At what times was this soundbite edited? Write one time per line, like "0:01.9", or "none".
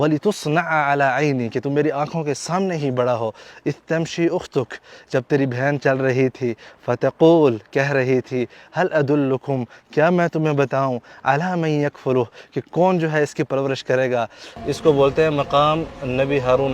0:14.5